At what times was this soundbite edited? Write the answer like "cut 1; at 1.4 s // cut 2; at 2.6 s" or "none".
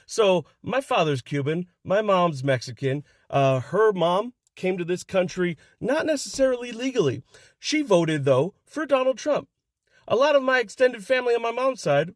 none